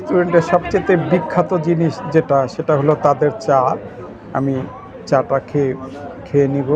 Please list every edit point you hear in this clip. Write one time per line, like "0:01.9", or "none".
none